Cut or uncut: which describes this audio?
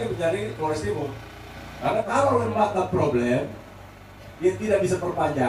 cut